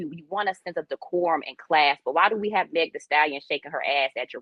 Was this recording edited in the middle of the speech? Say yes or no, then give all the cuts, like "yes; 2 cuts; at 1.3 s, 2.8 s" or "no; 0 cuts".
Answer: no; 0 cuts